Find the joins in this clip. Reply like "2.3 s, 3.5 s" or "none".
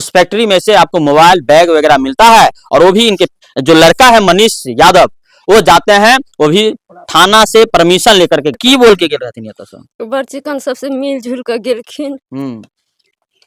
8.5 s